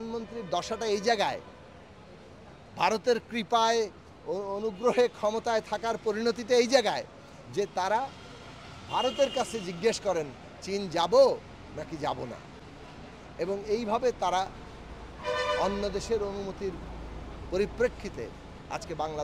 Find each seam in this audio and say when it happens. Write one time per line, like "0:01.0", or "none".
none